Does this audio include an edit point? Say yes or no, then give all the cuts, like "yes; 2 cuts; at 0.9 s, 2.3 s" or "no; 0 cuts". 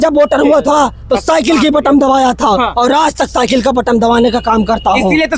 no; 0 cuts